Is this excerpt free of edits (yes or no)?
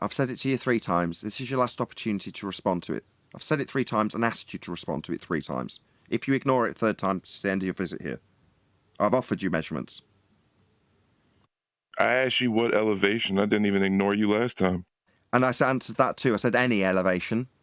yes